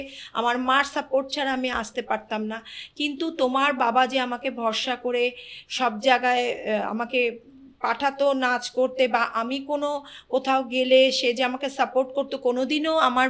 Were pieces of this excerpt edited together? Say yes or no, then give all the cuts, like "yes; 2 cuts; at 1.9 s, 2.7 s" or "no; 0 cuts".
no; 0 cuts